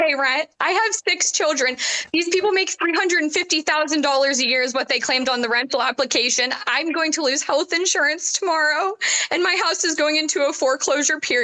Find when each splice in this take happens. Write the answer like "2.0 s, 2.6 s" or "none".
none